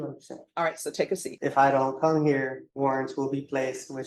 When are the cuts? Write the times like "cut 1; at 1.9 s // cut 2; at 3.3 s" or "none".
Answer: cut 1; at 1.3 s // cut 2; at 2.6 s